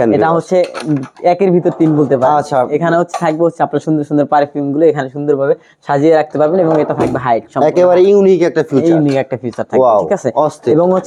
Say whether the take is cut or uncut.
uncut